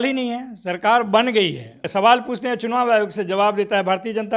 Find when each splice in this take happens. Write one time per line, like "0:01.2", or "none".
0:01.8